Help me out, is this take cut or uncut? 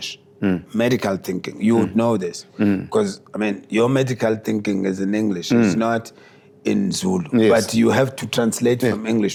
uncut